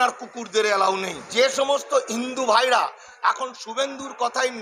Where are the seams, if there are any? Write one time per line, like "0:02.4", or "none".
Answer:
0:01.3